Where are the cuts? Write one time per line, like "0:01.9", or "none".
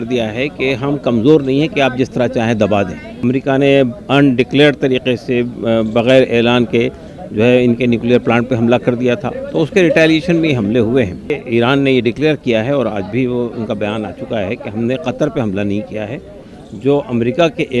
0:03.2
0:11.3